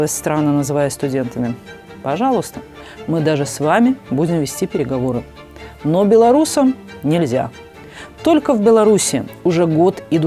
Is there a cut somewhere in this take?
no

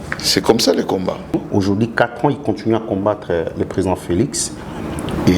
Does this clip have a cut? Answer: yes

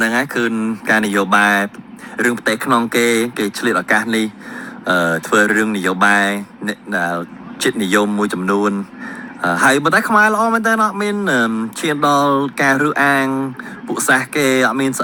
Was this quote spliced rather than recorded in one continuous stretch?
no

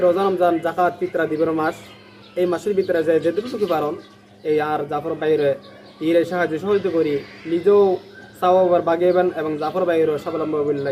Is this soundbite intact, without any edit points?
yes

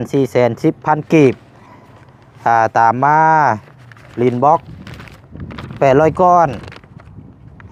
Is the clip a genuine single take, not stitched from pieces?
yes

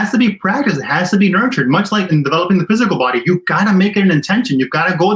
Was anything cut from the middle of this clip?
yes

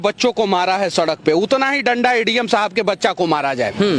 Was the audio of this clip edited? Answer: no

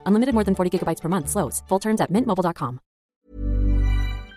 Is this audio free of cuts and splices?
no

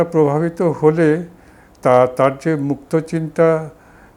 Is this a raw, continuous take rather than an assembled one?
yes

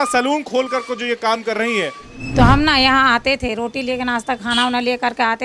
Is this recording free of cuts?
no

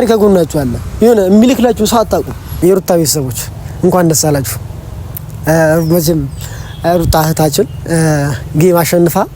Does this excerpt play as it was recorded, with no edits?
no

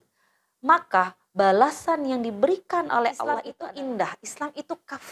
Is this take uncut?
no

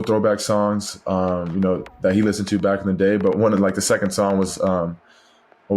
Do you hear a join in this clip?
no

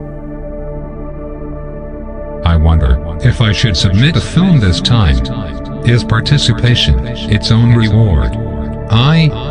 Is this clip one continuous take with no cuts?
yes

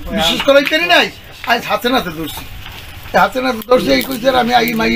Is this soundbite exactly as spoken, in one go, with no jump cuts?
yes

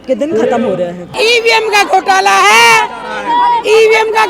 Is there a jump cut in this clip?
yes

